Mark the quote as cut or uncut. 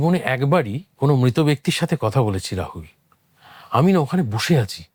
uncut